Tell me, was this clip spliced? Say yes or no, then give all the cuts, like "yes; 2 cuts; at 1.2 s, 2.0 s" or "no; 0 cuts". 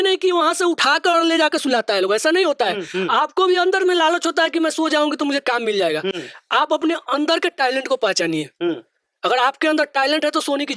no; 0 cuts